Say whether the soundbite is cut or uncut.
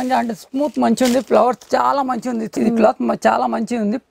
cut